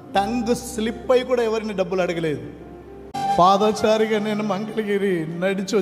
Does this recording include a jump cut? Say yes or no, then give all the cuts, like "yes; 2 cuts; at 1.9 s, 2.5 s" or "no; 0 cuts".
yes; 1 cut; at 3.2 s